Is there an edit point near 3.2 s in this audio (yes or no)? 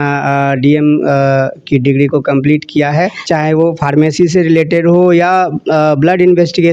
yes